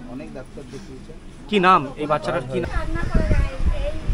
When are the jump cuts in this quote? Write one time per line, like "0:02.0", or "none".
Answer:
0:02.6